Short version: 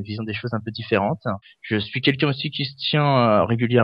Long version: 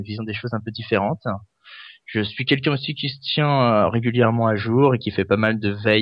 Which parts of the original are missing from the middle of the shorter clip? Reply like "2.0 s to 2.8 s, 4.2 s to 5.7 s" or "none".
1.5 s to 1.9 s